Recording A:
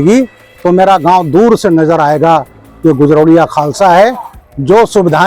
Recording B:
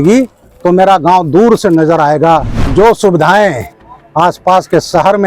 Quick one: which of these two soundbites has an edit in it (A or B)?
B